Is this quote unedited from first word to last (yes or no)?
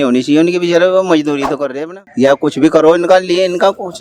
no